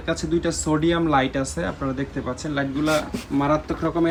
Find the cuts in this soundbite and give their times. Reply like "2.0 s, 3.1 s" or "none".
none

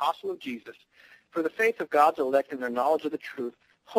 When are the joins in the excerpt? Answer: 2.1 s

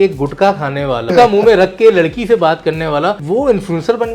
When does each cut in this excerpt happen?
1.1 s, 3.2 s

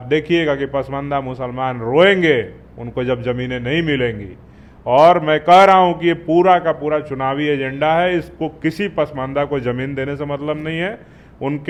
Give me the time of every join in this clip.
none

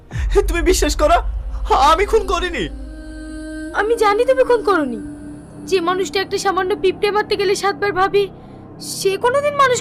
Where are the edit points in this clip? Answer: none

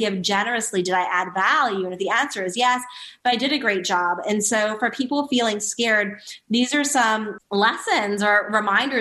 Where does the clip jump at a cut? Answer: 7.4 s

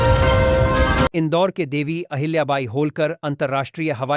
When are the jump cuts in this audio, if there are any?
1.1 s

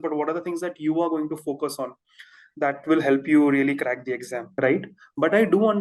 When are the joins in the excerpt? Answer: 4.4 s

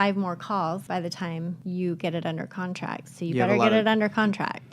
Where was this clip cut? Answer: 1.0 s

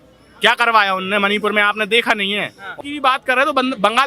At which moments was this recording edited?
2.7 s

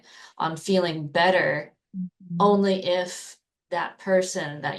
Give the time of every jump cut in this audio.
none

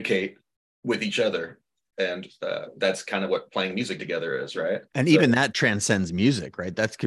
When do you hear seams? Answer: 4.9 s

